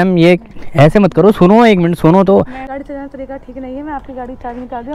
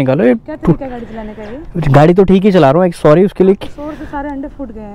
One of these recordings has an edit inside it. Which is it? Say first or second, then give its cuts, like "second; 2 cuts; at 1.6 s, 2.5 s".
first; 1 cut; at 2.6 s